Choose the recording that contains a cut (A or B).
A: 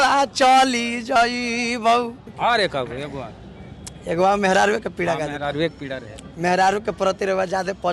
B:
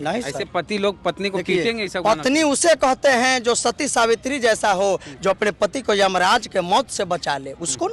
A